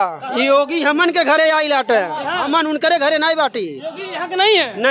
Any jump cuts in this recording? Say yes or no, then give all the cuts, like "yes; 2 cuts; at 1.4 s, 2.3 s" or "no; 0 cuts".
no; 0 cuts